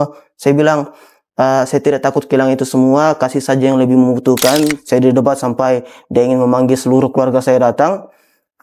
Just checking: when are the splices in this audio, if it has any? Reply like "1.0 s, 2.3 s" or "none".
4.8 s